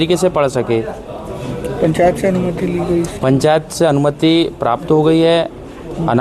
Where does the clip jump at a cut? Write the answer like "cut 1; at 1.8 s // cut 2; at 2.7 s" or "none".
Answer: none

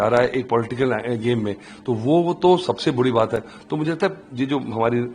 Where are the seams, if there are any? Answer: none

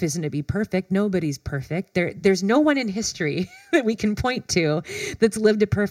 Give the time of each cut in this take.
none

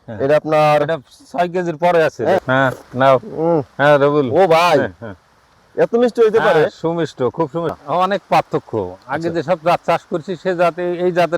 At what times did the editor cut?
cut 1; at 2.4 s // cut 2; at 7.7 s

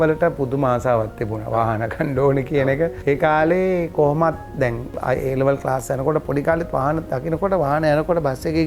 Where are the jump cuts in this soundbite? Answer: none

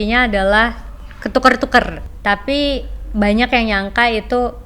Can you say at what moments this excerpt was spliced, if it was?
cut 1; at 2.0 s

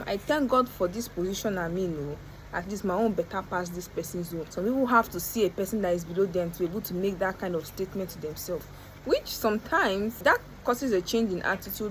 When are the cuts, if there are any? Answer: none

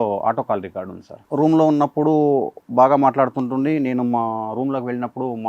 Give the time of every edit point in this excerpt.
cut 1; at 1.2 s

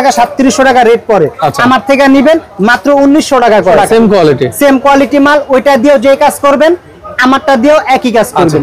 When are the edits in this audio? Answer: cut 1; at 3.8 s

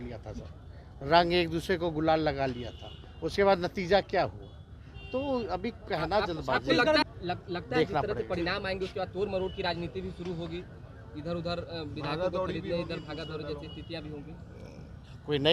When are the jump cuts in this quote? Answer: cut 1; at 7.0 s

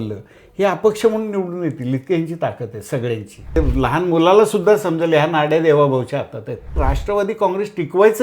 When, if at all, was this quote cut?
cut 1; at 3.6 s // cut 2; at 6.8 s

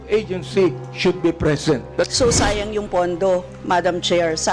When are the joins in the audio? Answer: cut 1; at 2.1 s

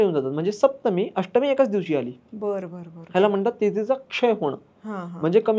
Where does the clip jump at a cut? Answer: none

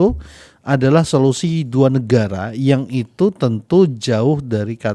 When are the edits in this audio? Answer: none

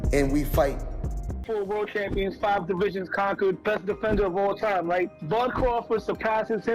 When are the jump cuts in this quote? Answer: cut 1; at 1.4 s

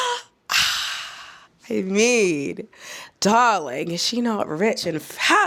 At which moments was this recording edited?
none

